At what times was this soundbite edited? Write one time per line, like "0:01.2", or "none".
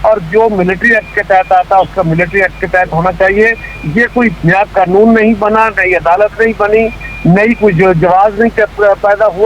none